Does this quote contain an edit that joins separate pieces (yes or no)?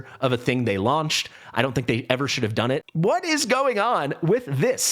yes